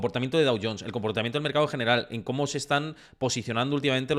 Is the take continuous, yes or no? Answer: yes